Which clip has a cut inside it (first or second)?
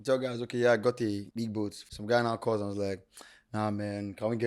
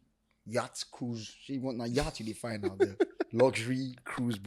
first